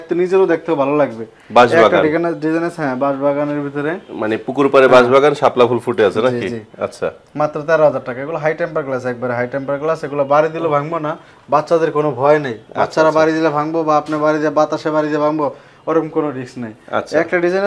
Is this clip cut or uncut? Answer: uncut